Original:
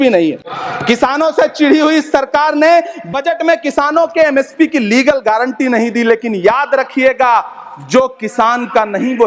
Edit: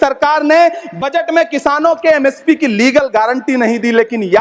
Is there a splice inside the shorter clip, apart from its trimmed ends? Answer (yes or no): no